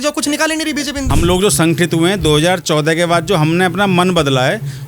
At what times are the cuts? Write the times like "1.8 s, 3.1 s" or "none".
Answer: 1.1 s